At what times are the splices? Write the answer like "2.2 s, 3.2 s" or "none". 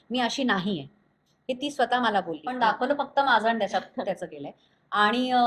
2.4 s